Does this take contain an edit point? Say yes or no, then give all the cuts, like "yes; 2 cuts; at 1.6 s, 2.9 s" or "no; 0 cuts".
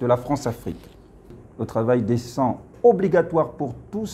yes; 1 cut; at 1.4 s